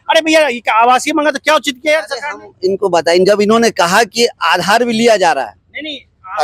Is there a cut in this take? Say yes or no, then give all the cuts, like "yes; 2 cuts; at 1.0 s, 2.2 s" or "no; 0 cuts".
no; 0 cuts